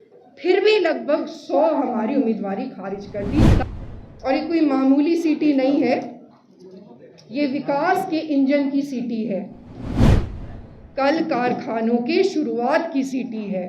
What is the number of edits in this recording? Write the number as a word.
one